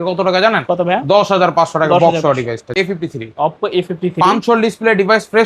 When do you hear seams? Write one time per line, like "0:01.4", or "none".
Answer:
0:02.7